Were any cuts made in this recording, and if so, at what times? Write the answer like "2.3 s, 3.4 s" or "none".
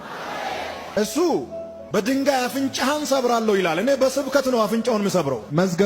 0.9 s

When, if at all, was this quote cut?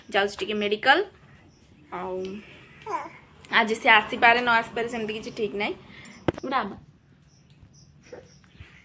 6.4 s

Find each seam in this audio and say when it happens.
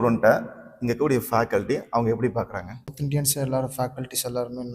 3.0 s

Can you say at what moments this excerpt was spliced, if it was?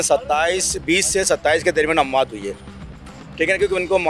2.8 s

